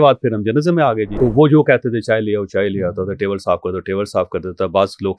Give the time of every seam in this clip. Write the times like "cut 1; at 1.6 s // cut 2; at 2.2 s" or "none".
cut 1; at 1.1 s